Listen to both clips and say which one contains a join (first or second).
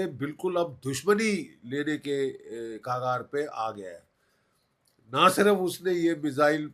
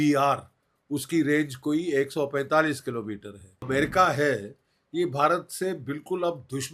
second